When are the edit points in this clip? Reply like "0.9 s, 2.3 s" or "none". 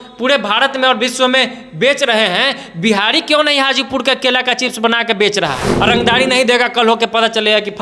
5.7 s